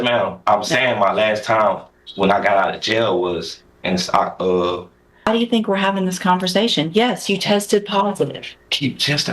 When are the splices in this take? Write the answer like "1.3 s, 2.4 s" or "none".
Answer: 5.0 s